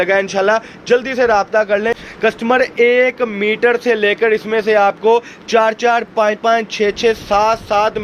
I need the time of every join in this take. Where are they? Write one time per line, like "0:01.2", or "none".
0:02.1